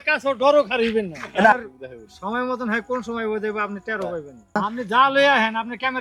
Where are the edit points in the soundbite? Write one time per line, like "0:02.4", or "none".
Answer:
0:01.5
0:04.6